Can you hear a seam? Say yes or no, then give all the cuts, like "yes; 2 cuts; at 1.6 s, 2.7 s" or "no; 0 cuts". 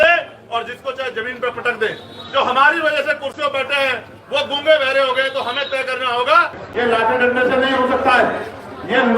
yes; 1 cut; at 6.6 s